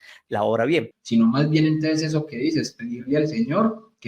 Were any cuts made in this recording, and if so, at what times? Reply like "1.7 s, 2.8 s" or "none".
0.9 s